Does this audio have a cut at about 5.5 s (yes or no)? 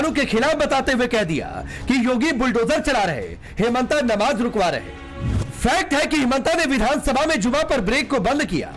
yes